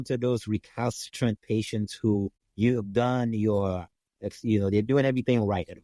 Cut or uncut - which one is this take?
cut